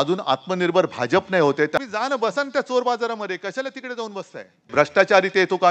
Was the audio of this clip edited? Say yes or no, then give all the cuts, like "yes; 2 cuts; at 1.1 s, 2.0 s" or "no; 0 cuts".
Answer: yes; 2 cuts; at 1.8 s, 4.7 s